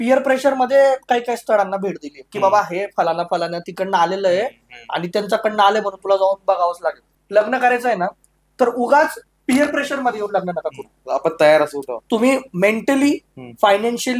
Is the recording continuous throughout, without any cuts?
no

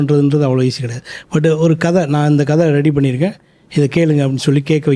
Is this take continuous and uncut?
yes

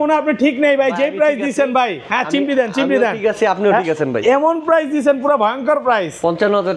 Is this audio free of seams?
yes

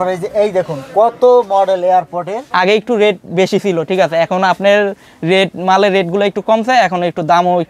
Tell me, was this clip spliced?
yes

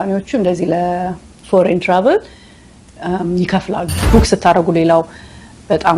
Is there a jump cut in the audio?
yes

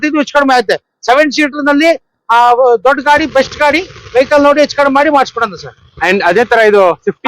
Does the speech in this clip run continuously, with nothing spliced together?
yes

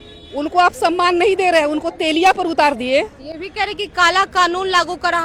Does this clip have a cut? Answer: no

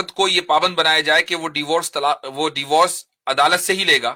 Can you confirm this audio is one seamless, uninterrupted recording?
yes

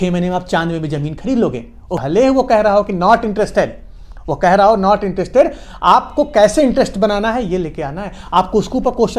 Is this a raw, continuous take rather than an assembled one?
no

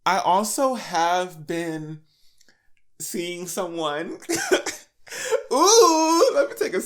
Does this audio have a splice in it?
no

